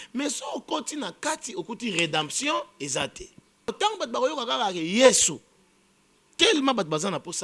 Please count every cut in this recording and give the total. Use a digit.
1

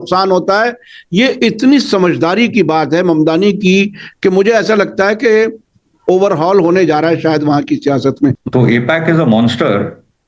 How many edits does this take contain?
1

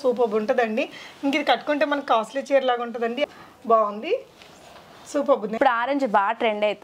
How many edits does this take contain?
2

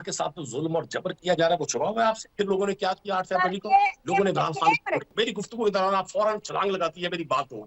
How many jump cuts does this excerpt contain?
3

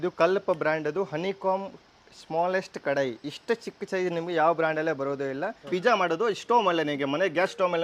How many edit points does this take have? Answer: 1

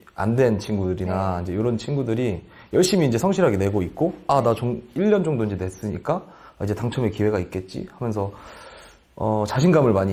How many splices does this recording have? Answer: 0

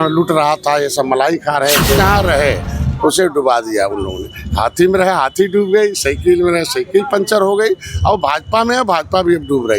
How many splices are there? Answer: 1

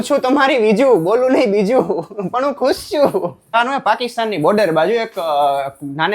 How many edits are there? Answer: 1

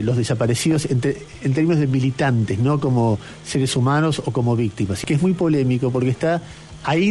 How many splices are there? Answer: 1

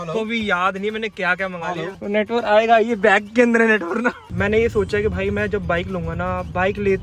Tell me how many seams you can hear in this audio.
2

